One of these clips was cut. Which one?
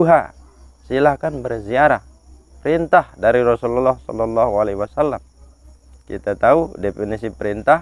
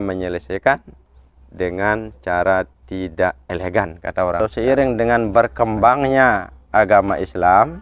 second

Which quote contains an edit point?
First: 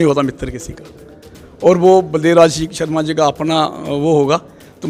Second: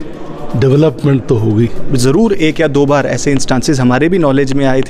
second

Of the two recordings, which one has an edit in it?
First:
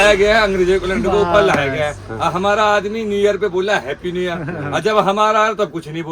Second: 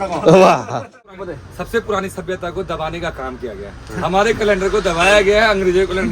second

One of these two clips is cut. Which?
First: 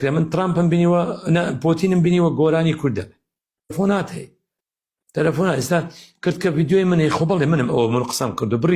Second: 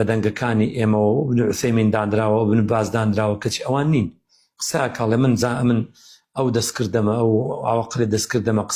first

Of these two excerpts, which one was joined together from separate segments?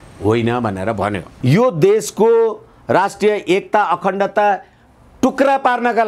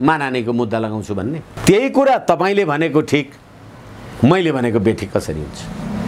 first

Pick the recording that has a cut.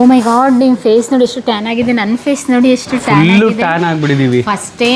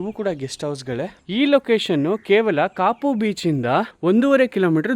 second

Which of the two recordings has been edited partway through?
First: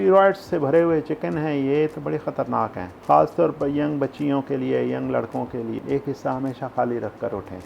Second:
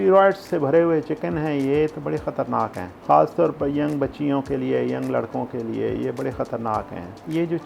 first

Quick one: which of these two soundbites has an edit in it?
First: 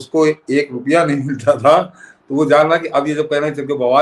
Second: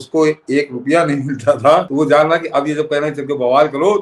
second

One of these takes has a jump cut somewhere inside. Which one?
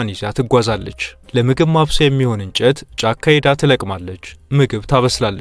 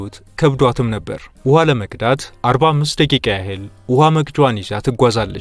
second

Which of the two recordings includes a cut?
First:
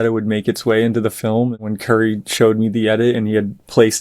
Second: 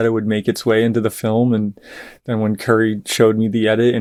first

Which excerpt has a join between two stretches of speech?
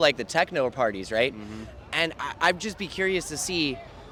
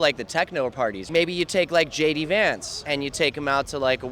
second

